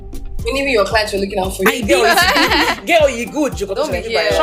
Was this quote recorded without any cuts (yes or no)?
yes